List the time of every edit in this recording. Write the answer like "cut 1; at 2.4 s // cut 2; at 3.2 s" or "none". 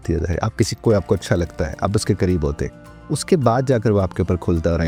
none